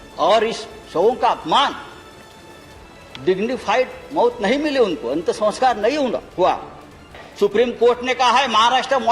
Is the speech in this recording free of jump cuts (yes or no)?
no